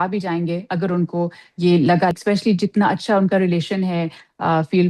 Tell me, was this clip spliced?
yes; 1 cut; at 2.1 s

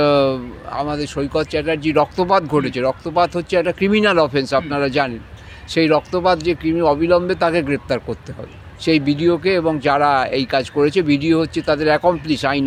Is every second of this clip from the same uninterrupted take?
yes; 0 cuts

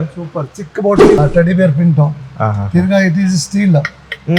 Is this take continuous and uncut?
no; 1 cut; at 1.2 s

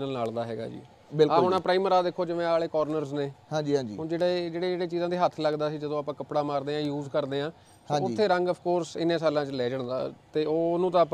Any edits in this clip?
no; 0 cuts

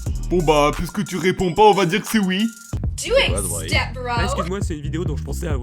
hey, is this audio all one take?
no; 1 cut; at 2.9 s

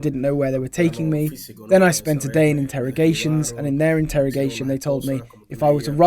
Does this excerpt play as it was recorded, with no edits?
yes; 0 cuts

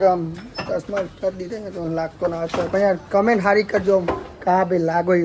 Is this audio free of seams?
yes; 0 cuts

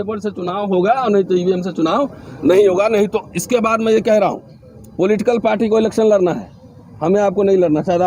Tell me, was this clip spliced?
no; 0 cuts

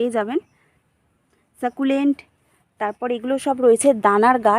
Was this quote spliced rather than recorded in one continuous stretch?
no; 0 cuts

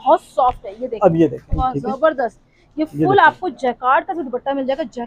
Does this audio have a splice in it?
yes; 1 cut; at 1.6 s

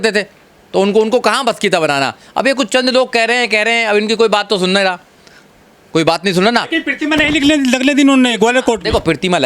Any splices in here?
no; 0 cuts

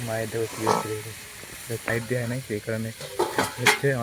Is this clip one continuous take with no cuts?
no; 1 cut; at 1.9 s

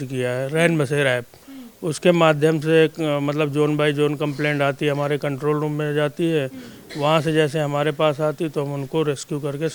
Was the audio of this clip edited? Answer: no; 0 cuts

